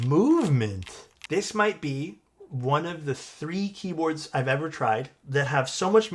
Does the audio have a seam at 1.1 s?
yes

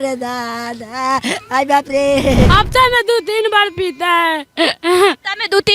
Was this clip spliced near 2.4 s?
yes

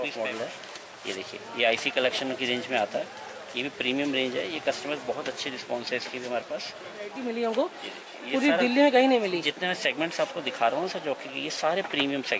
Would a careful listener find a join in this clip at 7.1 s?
yes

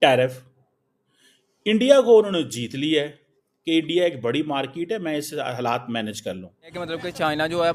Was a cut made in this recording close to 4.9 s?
no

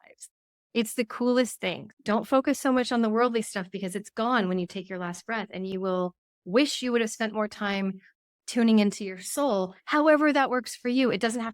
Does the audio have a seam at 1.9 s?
yes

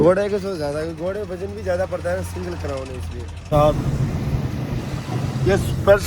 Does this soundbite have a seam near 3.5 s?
yes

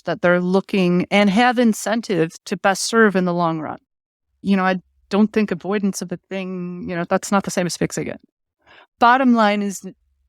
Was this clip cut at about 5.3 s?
no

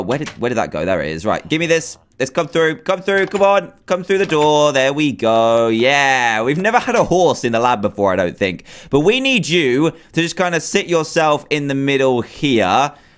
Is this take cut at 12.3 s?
yes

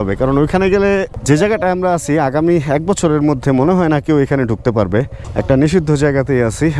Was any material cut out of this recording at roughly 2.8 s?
no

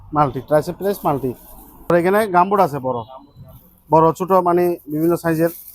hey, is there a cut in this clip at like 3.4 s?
no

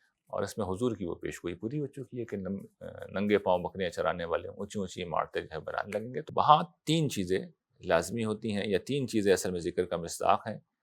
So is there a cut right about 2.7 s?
no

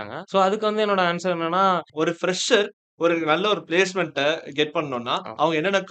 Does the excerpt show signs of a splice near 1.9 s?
yes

